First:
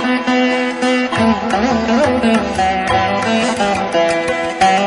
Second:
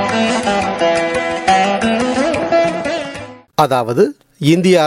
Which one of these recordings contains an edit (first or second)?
second